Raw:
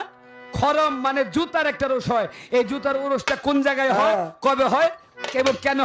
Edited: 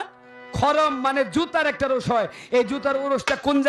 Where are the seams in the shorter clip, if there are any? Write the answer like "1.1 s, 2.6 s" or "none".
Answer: none